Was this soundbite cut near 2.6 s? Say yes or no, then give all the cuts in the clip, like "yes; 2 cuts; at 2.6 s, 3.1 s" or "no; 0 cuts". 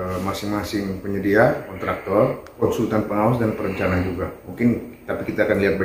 yes; 1 cut; at 2.6 s